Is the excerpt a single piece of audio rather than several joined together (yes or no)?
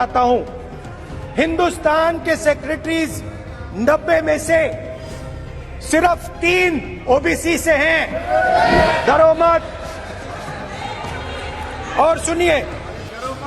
no